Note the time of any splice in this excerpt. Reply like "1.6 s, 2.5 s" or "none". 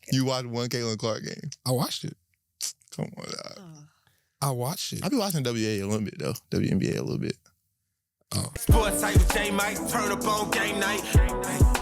8.5 s